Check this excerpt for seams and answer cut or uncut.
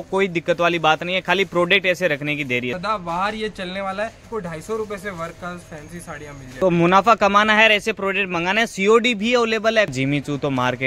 cut